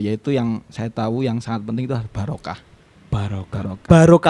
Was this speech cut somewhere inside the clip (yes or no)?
no